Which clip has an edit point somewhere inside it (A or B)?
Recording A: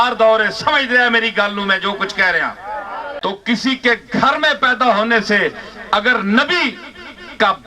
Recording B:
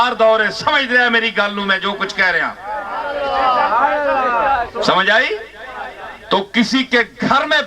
A